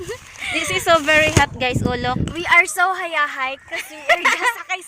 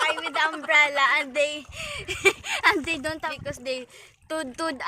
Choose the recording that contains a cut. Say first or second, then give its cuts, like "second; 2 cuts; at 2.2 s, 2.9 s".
second; 1 cut; at 3.3 s